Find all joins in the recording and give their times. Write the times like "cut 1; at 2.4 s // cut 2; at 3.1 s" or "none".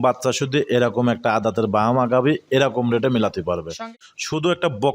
cut 1; at 3.8 s